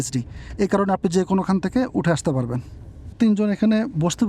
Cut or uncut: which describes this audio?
cut